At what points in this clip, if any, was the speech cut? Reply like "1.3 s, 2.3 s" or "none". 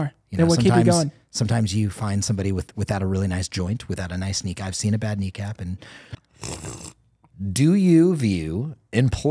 6.6 s